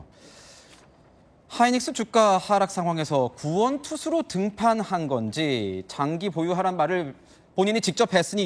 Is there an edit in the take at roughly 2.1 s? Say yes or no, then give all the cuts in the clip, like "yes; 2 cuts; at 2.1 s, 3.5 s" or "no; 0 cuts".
no; 1 cut; at 3.9 s